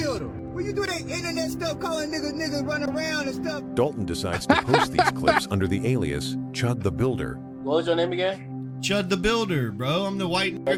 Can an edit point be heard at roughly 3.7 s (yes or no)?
no